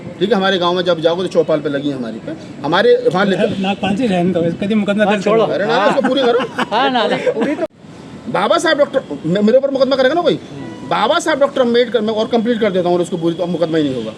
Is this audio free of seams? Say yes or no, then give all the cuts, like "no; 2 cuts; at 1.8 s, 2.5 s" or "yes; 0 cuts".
yes; 0 cuts